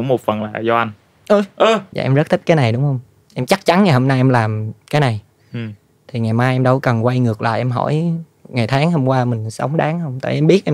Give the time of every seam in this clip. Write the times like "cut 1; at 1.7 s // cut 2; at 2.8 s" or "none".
cut 1; at 1.9 s